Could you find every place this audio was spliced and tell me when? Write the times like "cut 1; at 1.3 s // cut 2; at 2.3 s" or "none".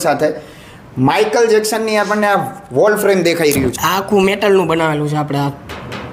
cut 1; at 3.7 s